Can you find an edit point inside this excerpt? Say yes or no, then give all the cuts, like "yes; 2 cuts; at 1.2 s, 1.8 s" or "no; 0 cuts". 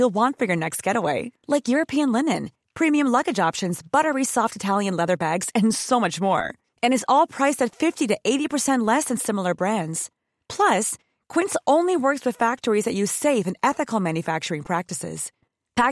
no; 0 cuts